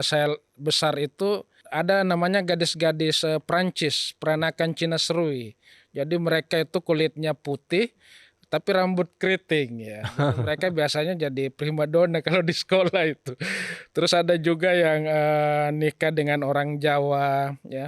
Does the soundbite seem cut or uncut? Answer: uncut